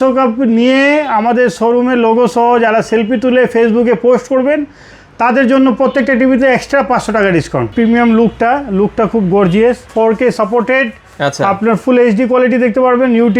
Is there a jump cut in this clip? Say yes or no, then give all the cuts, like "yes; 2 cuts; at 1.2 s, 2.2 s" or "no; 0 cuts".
yes; 2 cuts; at 7.7 s, 9.9 s